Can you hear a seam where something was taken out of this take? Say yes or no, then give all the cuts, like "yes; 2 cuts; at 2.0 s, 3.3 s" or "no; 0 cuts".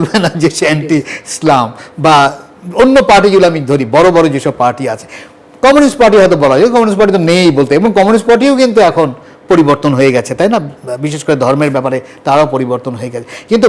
no; 0 cuts